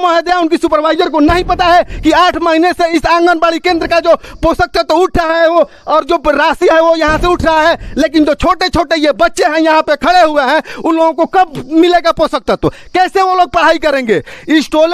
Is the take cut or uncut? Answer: uncut